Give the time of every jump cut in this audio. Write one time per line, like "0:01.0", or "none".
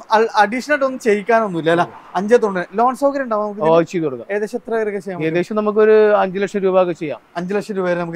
none